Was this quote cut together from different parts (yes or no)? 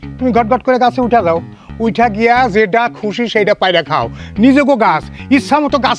no